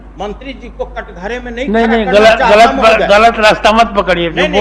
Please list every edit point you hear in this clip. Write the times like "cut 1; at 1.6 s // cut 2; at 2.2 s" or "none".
none